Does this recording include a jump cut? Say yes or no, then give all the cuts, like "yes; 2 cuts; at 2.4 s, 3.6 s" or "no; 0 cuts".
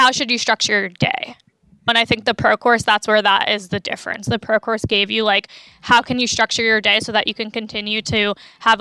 no; 0 cuts